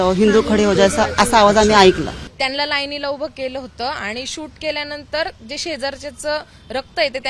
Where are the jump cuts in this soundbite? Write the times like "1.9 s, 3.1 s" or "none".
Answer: 2.2 s